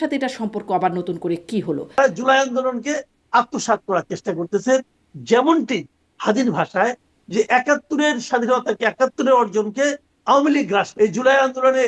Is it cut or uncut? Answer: cut